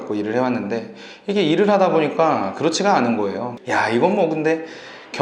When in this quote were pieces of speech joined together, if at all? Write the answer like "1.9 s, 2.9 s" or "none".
3.5 s